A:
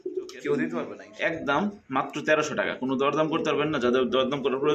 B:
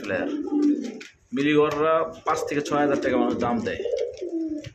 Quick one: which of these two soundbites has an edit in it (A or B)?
A